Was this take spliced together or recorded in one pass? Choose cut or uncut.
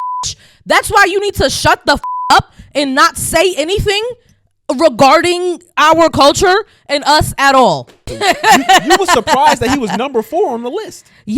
cut